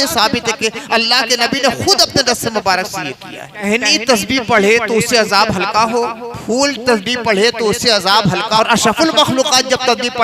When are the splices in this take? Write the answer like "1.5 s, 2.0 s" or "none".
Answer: 3.6 s, 8.6 s